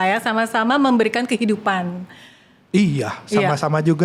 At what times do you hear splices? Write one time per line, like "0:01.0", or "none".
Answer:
none

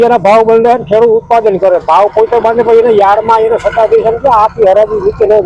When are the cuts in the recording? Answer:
none

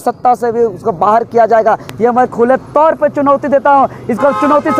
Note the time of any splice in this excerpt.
none

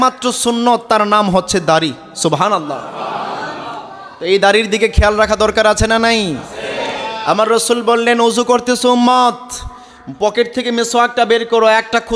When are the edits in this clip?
none

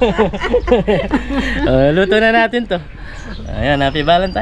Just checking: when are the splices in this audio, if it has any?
none

